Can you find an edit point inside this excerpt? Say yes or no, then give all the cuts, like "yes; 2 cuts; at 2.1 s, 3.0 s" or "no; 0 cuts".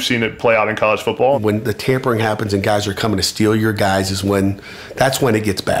yes; 1 cut; at 1.4 s